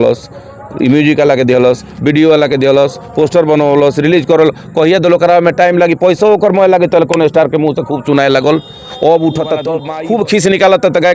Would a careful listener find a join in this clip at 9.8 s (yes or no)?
yes